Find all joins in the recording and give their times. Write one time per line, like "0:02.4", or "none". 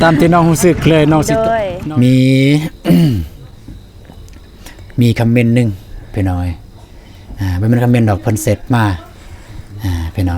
0:01.7